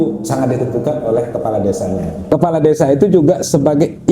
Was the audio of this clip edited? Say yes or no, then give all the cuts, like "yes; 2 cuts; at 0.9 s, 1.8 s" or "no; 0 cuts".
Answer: yes; 1 cut; at 2.1 s